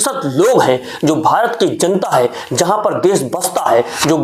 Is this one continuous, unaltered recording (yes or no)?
yes